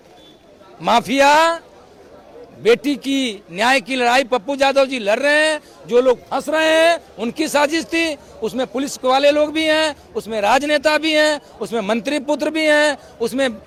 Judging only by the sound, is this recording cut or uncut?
uncut